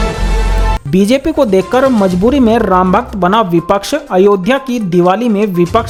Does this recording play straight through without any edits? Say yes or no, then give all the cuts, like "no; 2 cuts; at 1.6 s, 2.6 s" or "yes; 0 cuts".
yes; 0 cuts